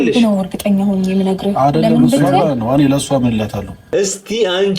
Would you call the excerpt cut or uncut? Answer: cut